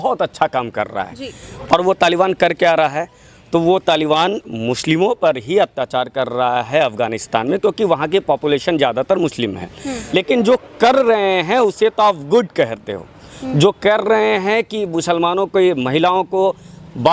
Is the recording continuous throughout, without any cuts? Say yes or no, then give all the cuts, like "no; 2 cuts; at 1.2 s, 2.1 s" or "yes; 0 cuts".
yes; 0 cuts